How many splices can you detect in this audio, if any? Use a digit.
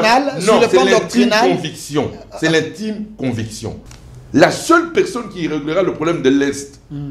1